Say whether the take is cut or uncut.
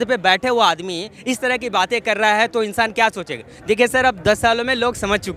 uncut